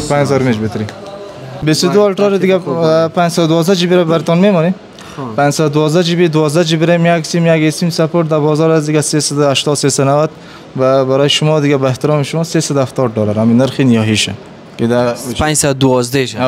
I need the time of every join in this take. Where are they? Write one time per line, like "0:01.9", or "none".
0:01.5